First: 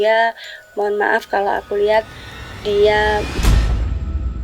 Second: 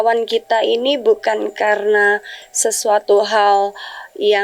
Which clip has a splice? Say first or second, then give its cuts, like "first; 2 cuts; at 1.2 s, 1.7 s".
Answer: first; 1 cut; at 3.3 s